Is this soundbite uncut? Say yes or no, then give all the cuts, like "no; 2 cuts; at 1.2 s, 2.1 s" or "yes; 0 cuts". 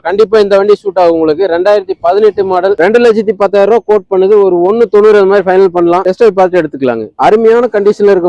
no; 2 cuts; at 2.7 s, 7.1 s